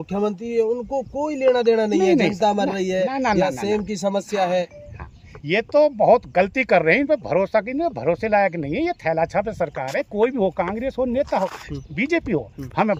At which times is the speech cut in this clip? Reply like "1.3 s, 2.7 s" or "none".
none